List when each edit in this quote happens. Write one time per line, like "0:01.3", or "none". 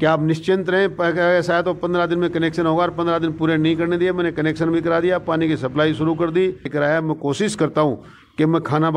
0:06.7